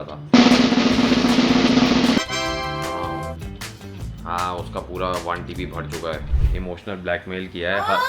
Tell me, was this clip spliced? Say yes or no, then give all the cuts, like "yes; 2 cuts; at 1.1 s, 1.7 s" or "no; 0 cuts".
yes; 1 cut; at 6.4 s